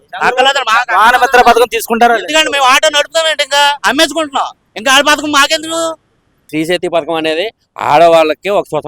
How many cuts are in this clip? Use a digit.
1